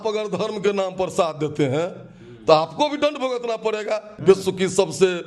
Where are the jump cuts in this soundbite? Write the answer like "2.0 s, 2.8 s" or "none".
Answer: 4.1 s